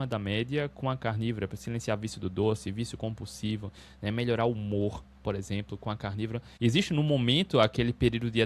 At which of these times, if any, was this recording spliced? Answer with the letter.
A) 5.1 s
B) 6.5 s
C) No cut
B